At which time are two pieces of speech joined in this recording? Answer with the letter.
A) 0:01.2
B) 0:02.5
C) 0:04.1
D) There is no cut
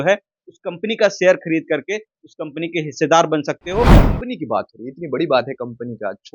C